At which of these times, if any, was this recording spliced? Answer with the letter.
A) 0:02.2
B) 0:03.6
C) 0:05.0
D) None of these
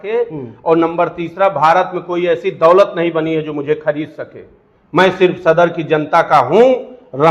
D